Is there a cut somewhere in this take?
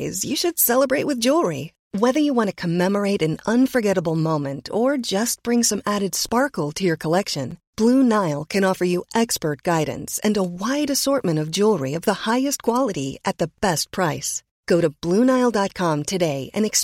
no; 0 cuts

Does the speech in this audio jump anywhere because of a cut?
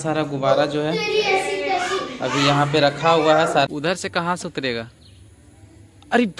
yes; 1 cut; at 3.7 s

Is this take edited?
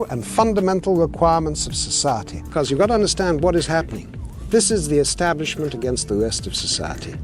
no; 0 cuts

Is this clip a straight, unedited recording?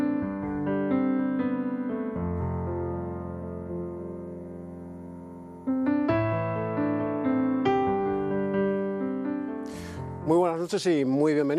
yes; 0 cuts

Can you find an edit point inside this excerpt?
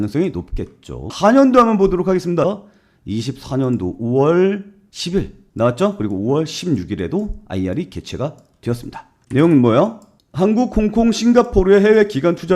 yes; 2 cuts; at 2.4 s, 10.1 s

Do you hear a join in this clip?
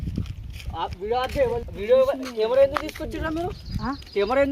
yes; 1 cut; at 1.7 s

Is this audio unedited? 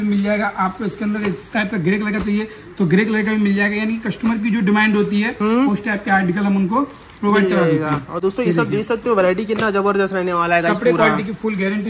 yes; 0 cuts

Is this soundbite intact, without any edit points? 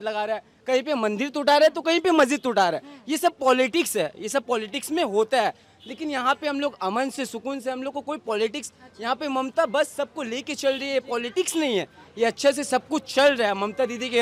yes; 0 cuts

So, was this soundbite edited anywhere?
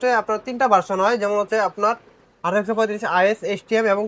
no; 0 cuts

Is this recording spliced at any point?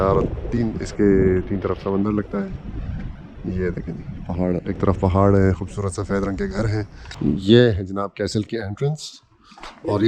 yes; 1 cut; at 7.0 s

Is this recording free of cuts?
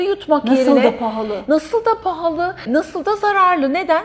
no; 1 cut; at 2.6 s

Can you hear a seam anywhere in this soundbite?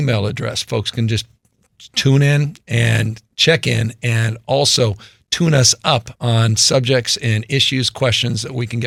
no; 0 cuts

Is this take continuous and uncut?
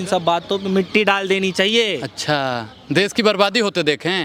yes; 0 cuts

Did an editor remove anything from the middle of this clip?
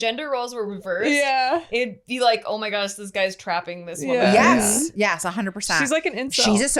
no; 0 cuts

